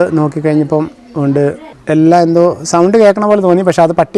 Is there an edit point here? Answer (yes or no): yes